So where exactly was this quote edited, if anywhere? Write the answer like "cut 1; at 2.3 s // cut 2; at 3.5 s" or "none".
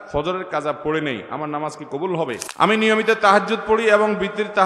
cut 1; at 2.5 s